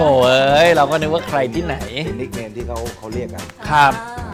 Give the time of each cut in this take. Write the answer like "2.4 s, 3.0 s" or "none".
none